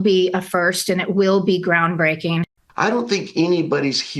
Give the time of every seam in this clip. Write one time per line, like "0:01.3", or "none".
0:02.7